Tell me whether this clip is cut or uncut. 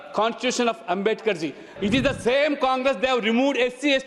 cut